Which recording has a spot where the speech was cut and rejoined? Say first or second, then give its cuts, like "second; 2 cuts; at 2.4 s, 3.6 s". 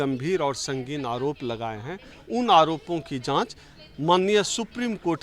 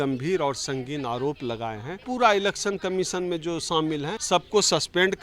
second; 2 cuts; at 2.0 s, 4.2 s